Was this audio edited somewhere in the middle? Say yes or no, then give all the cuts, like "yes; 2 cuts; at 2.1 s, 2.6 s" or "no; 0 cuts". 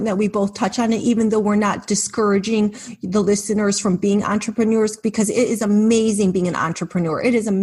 no; 0 cuts